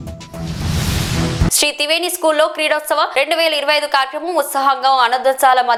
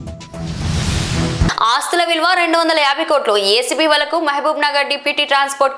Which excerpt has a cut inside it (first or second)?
second